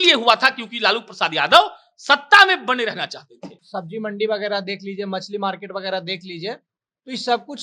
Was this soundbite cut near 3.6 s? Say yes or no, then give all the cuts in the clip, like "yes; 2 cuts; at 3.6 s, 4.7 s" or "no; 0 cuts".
yes; 1 cut; at 3.6 s